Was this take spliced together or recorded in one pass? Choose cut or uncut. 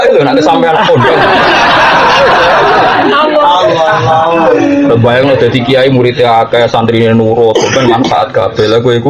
uncut